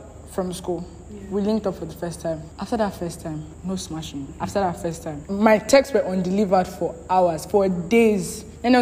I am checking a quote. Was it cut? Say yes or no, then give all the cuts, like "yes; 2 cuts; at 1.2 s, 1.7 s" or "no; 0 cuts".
yes; 4 cuts; at 2.5 s, 3.5 s, 4.3 s, 5.2 s